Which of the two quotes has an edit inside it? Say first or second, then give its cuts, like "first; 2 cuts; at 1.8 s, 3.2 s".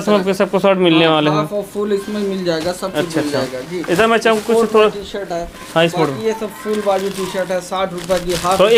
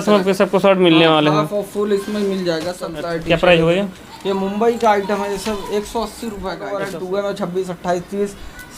second; 2 cuts; at 2.9 s, 6.7 s